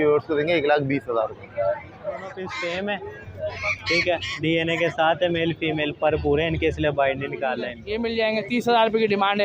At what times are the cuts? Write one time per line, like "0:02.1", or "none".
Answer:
0:02.3
0:07.8